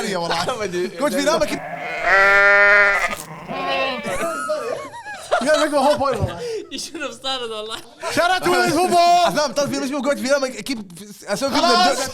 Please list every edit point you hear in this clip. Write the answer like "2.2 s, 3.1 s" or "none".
7.9 s, 9.3 s